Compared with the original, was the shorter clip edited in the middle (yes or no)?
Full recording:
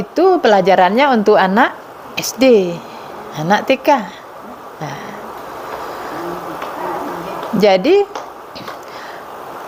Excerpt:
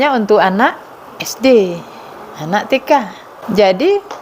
yes